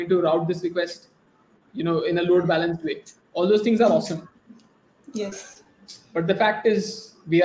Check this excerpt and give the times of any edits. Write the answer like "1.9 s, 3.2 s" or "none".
none